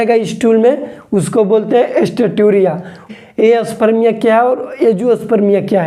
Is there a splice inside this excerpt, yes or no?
yes